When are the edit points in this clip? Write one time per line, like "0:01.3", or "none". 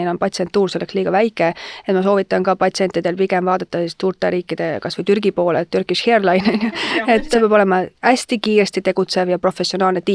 0:06.8